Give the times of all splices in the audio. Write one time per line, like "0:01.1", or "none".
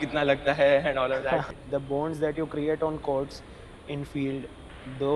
0:01.4